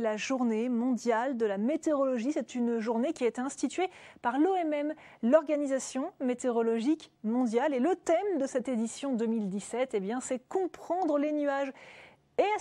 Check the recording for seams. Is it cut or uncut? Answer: uncut